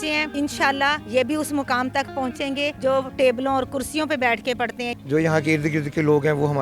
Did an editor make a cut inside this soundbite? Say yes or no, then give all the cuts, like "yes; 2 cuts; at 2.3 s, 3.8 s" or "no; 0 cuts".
yes; 1 cut; at 4.9 s